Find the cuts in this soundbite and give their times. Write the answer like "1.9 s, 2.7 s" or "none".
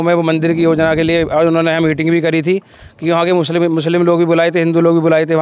none